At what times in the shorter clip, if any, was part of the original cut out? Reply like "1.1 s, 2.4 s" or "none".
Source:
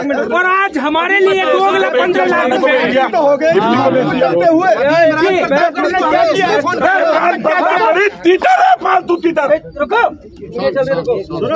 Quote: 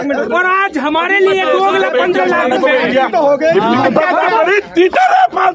3.9 s